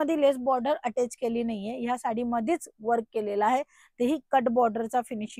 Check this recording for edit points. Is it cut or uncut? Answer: uncut